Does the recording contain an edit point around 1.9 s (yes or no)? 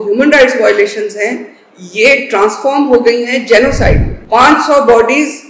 no